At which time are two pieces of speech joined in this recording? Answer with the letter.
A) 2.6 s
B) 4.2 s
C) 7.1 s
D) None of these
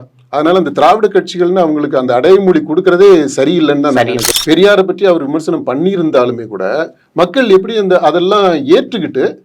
B